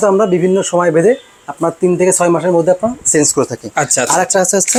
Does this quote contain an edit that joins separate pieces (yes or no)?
no